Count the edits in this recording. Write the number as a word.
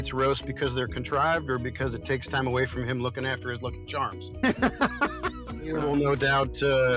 one